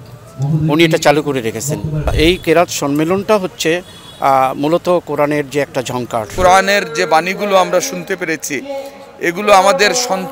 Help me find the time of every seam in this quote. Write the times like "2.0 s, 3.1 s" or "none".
2.1 s, 6.3 s